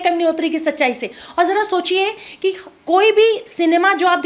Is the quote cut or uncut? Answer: uncut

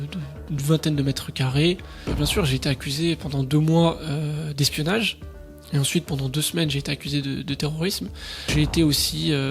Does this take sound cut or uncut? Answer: cut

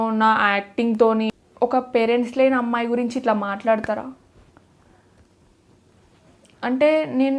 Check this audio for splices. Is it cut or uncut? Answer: cut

